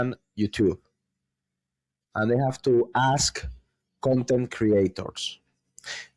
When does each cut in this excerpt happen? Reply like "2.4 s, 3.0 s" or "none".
none

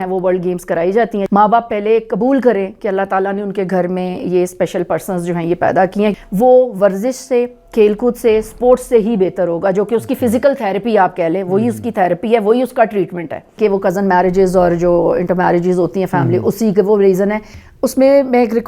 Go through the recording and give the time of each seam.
1.2 s, 6.1 s, 13.5 s, 17.5 s

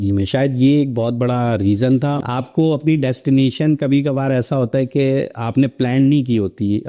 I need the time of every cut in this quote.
2.2 s

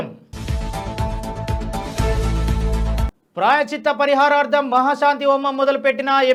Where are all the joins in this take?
none

